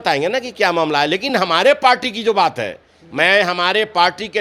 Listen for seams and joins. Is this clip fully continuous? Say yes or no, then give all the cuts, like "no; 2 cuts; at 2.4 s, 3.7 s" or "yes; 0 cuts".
yes; 0 cuts